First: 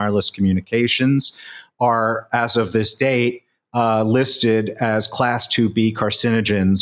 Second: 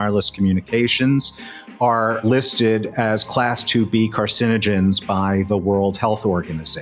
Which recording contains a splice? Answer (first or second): second